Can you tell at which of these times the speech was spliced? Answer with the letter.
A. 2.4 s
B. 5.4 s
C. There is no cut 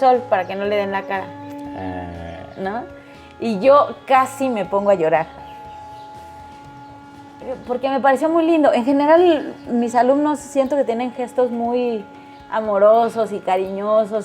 B